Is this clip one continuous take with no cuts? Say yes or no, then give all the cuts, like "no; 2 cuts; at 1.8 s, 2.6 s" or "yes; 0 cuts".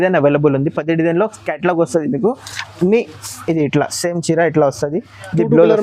yes; 0 cuts